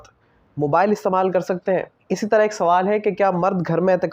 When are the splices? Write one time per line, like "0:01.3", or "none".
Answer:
0:02.0